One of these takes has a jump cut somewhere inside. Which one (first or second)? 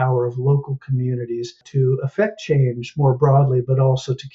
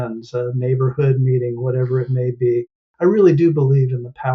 first